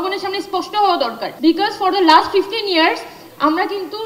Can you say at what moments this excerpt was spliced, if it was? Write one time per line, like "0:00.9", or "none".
0:01.2

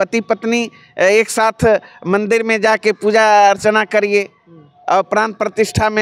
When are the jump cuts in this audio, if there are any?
none

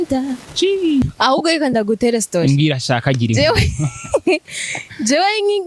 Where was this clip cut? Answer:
0:01.0

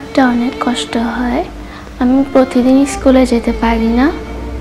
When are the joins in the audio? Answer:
none

